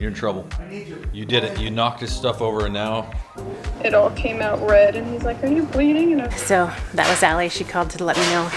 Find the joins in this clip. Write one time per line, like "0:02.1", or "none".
0:03.6
0:06.3